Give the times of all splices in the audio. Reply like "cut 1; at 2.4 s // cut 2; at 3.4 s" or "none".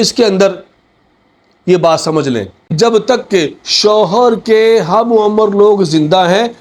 cut 1; at 2.7 s